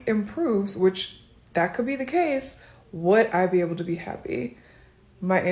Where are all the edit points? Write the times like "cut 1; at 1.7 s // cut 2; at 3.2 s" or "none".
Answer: none